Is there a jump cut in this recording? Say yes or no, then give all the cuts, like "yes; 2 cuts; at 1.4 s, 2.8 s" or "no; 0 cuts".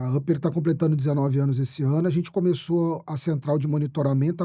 no; 0 cuts